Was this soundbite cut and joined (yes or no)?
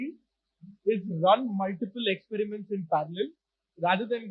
no